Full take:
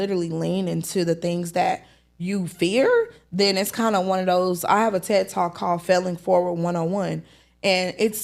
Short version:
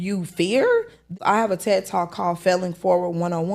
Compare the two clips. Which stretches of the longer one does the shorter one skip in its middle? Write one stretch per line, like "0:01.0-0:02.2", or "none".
0:03.3-0:04.6